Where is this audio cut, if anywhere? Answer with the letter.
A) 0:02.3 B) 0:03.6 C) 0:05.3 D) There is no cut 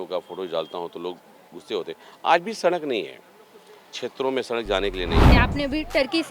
C